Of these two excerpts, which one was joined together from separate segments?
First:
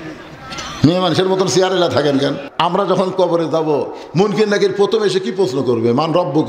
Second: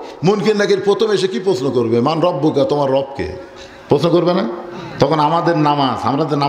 first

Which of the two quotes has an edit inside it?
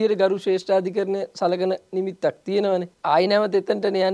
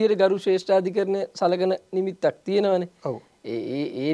first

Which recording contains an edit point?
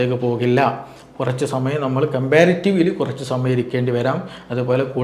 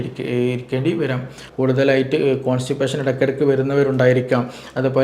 second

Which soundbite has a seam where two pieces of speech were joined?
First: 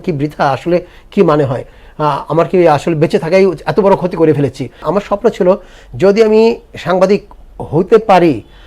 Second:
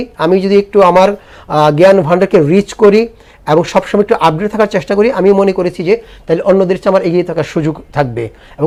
first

